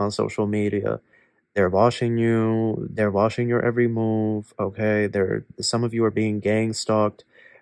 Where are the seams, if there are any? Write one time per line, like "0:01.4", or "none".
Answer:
none

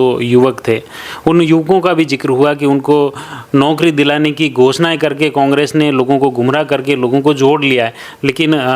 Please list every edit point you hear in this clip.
none

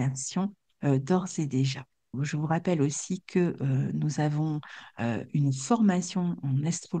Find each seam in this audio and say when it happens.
0:02.1

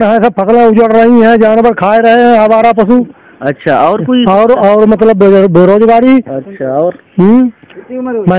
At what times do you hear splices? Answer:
none

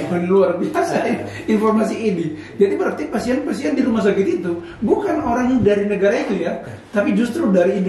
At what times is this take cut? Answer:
none

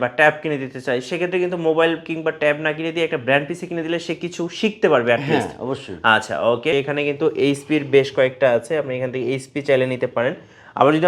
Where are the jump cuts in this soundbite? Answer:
0:06.7

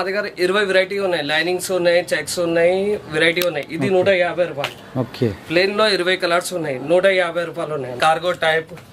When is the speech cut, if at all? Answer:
0:07.9

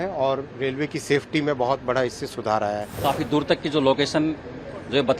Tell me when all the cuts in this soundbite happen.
0:03.0

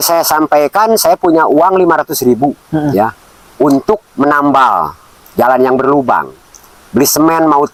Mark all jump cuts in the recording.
none

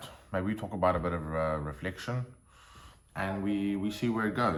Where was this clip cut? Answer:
none

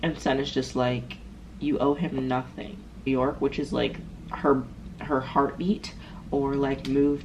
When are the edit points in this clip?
0:03.1

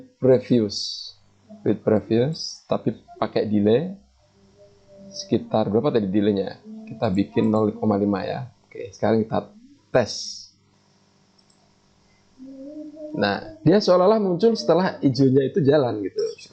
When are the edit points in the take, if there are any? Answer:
none

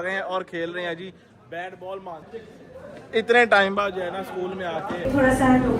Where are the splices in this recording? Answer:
0:02.3
0:05.1

